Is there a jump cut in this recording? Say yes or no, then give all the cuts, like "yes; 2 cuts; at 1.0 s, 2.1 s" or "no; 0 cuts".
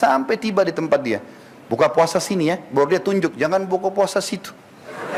no; 0 cuts